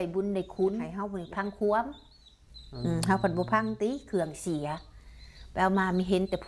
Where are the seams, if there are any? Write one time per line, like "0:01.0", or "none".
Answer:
0:01.4